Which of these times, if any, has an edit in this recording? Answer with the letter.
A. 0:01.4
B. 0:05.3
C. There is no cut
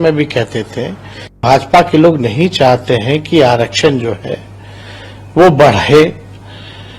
A